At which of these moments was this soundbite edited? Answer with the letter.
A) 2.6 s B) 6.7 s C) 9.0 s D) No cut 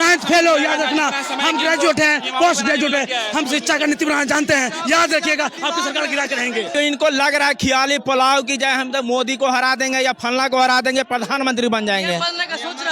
B